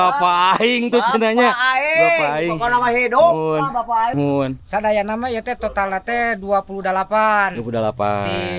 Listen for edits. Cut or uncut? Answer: cut